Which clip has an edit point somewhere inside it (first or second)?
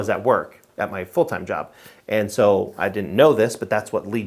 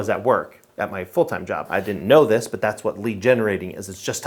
second